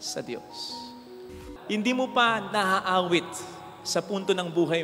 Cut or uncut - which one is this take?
cut